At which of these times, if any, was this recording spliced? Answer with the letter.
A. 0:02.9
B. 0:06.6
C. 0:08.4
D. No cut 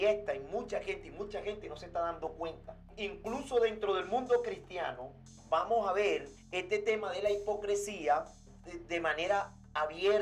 A